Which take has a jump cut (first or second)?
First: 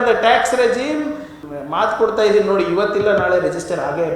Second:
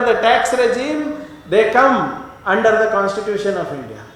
first